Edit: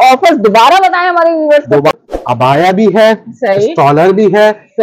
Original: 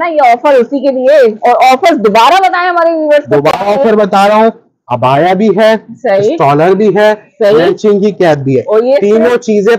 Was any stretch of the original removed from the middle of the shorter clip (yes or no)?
yes